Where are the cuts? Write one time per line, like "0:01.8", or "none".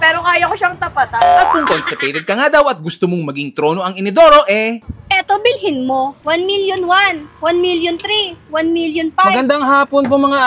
0:01.2